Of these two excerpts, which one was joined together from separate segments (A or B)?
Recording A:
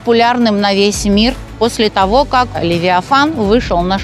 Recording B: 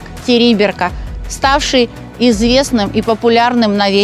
A